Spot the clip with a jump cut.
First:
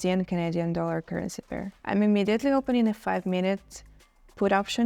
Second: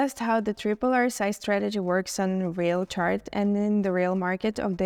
first; 1 cut; at 1.7 s

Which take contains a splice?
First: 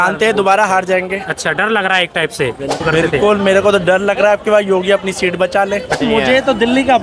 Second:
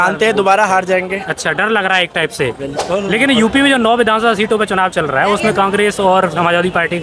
first; 2 cuts; at 2.8 s, 6.0 s

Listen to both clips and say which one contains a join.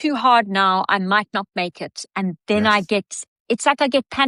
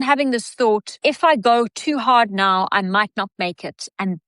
second; 1 cut; at 0.9 s

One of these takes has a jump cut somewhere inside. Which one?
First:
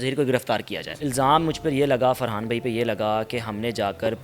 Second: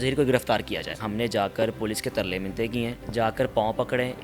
second; 2 cuts; at 0.9 s, 3.0 s

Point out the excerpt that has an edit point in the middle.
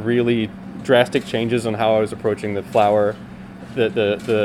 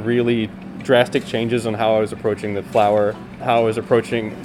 second; 1 cut; at 3.3 s

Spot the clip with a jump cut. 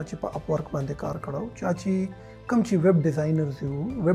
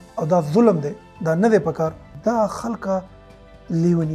second; 1 cut; at 2.0 s

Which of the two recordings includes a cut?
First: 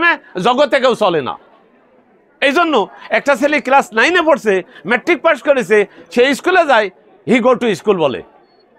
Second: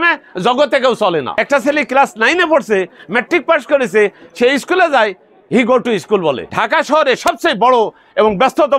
second; 2 cuts; at 1.3 s, 6.5 s

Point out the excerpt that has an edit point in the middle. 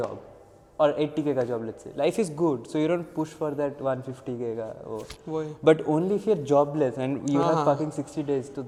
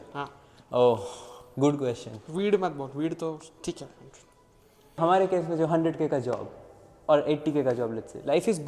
second; 1 cut; at 4.9 s

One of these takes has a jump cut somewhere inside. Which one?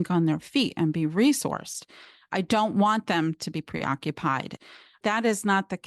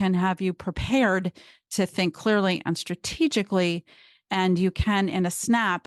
first; 1 cut; at 4.6 s

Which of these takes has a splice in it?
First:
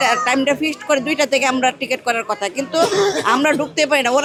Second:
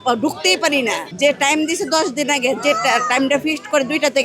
second; 1 cut; at 1.1 s

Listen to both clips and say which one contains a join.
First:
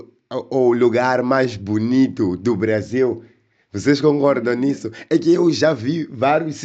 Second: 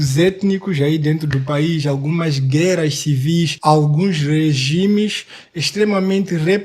second; 1 cut; at 3.5 s

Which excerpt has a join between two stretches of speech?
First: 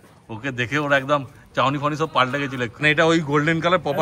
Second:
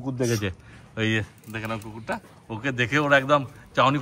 first; 1 cut; at 2.8 s

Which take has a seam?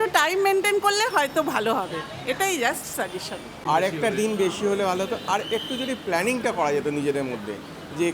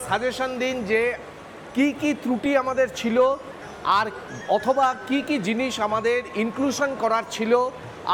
first; 1 cut; at 3.6 s

